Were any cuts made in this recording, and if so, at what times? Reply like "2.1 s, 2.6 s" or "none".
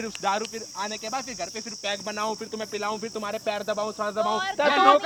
none